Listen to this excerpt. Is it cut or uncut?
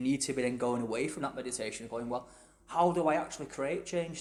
uncut